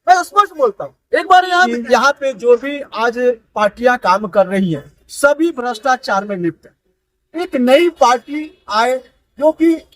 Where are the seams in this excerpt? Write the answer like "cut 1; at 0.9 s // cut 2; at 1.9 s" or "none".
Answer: cut 1; at 1.7 s